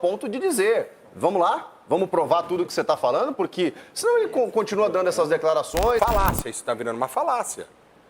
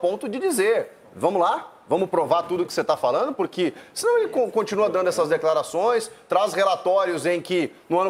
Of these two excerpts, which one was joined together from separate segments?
first; 1 cut; at 6.0 s

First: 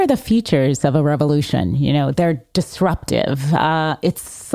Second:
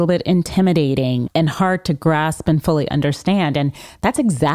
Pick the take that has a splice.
second; 1 cut; at 1.3 s

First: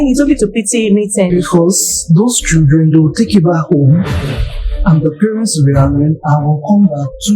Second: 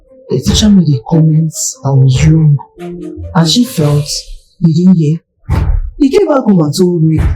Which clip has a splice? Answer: first; 1 cut; at 1.3 s

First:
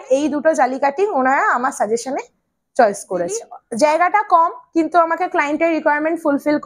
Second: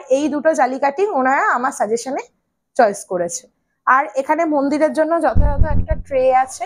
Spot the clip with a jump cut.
first; 1 cut; at 3.6 s

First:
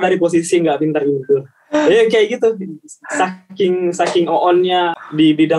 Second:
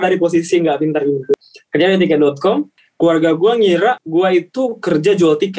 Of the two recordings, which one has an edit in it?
second; 3 cuts; at 1.3 s, 2.8 s, 4.0 s

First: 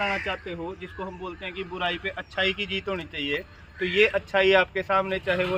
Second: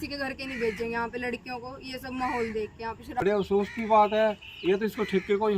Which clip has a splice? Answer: second; 1 cut; at 3.2 s

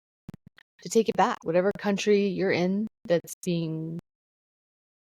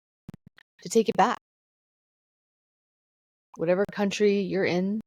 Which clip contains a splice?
first; 1 cut; at 1.4 s

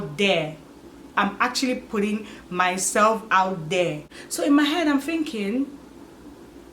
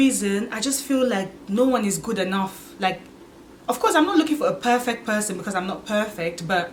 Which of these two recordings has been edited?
first; 1 cut; at 4.1 s

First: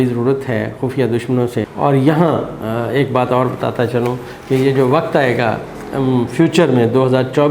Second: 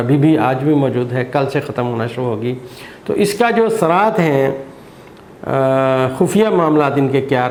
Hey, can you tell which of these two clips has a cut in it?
first; 1 cut; at 1.7 s

